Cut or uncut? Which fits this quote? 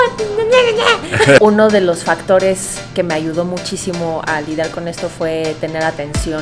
cut